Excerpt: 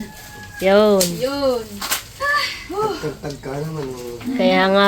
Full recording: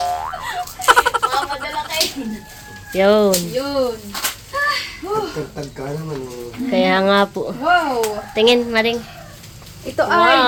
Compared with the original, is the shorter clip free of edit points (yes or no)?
yes